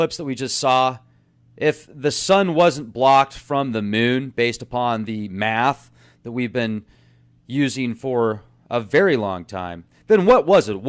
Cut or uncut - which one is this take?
cut